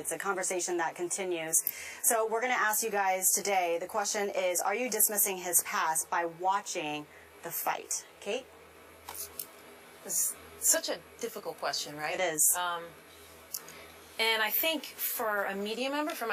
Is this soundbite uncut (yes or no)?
no